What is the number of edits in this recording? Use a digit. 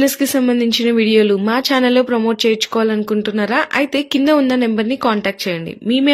0